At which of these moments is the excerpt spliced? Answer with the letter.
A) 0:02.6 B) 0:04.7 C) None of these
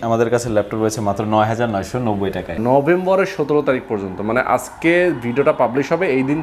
A